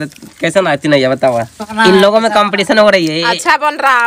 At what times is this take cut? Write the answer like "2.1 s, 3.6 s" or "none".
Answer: 1.6 s